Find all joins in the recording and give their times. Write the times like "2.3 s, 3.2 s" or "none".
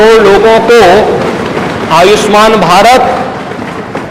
none